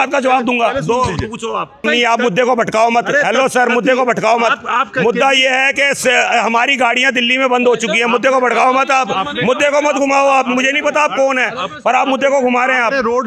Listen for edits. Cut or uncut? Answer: cut